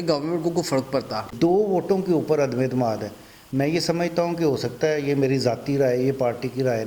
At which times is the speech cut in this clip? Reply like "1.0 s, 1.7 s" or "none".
1.3 s